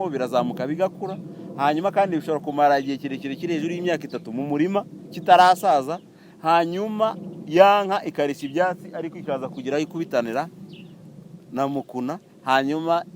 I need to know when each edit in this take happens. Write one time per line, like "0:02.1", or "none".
none